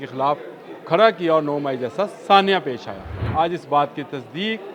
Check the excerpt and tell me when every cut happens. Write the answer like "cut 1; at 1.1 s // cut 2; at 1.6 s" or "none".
cut 1; at 3.2 s